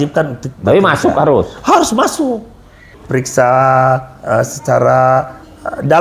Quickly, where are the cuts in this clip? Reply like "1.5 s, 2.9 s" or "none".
2.9 s